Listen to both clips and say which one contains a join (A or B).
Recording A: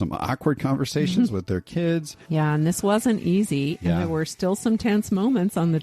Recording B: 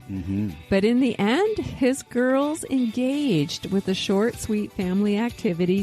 A